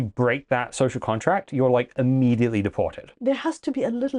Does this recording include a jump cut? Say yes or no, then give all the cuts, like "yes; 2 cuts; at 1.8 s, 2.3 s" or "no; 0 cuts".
yes; 1 cut; at 3.1 s